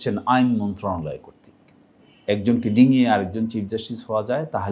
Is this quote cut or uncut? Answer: cut